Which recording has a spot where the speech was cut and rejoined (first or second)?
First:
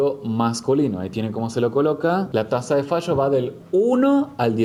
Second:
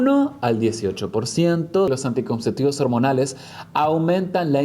second